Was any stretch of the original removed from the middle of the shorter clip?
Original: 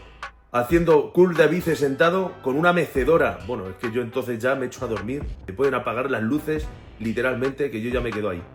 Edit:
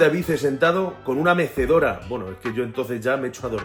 no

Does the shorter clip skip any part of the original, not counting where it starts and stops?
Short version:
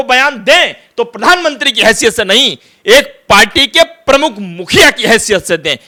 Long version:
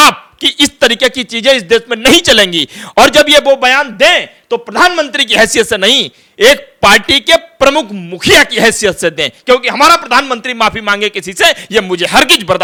no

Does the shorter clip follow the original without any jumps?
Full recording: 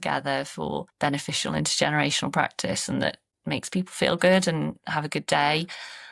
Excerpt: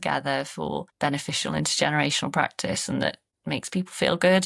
yes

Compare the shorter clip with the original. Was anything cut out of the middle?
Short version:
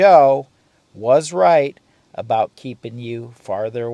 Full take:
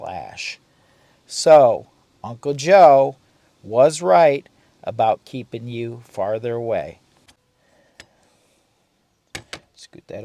no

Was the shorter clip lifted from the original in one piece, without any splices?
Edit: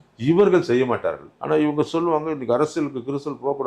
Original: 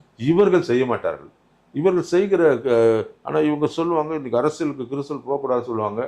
no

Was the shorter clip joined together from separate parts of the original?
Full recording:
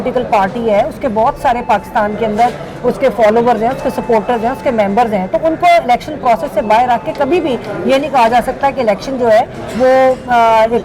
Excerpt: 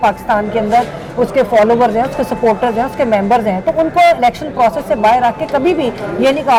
no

